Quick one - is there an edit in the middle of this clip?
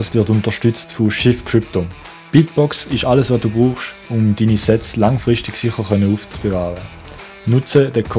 no; 0 cuts

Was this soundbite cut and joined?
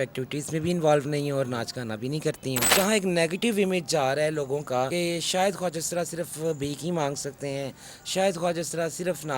yes; 2 cuts; at 2.7 s, 4.9 s

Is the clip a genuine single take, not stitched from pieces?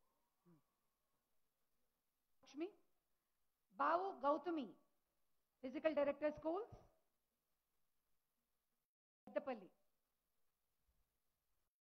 no; 1 cut; at 2.2 s

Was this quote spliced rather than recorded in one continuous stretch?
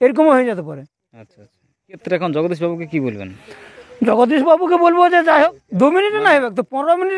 yes; 2 cuts; at 2.0 s, 5.5 s

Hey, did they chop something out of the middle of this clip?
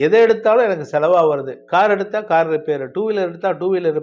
no; 0 cuts

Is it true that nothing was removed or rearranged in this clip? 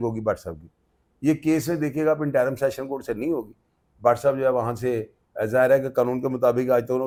yes; 0 cuts

